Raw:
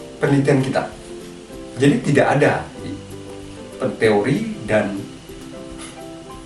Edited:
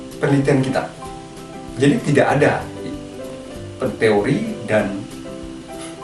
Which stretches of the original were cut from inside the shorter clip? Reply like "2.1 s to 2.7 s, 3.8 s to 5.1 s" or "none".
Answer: 5.1 s to 5.4 s